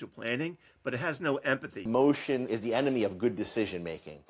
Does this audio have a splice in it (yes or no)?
yes